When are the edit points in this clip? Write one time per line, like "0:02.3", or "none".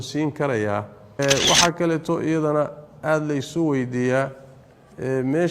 0:01.2